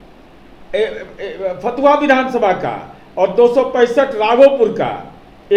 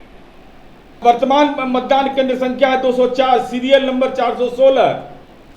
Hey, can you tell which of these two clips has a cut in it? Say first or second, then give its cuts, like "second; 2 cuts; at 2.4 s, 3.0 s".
second; 1 cut; at 1.0 s